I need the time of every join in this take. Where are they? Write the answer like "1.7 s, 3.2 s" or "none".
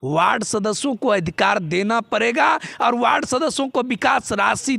none